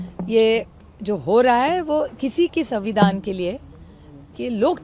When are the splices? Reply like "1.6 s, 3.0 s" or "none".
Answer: none